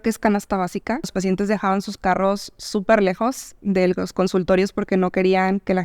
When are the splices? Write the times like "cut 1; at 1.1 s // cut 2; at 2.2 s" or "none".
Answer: cut 1; at 1.1 s